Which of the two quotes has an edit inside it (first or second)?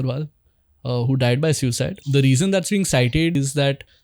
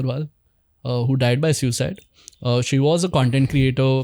first